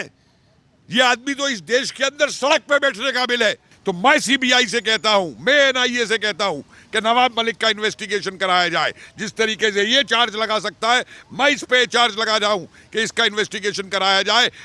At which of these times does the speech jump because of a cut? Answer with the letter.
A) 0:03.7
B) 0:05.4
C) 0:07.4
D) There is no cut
A